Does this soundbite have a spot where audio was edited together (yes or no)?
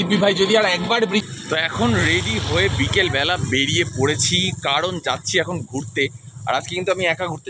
yes